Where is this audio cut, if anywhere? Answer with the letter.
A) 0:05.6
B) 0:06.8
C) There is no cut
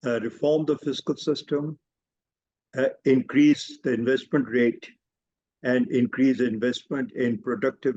C